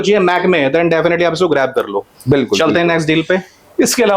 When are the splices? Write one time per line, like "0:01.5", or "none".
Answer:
none